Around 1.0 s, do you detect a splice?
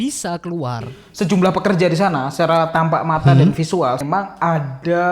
yes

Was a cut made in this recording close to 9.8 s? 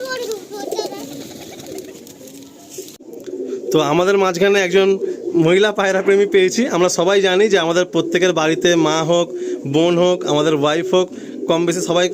no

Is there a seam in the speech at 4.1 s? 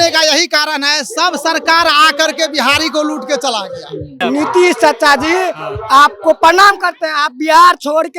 yes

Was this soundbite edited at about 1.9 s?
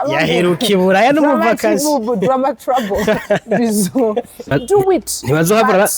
no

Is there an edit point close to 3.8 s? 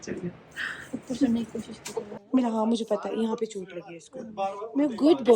no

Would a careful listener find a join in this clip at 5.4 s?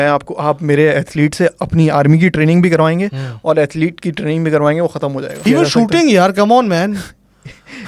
yes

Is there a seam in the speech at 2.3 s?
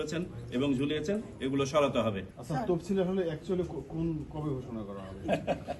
yes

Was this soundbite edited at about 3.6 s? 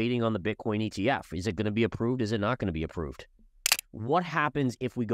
yes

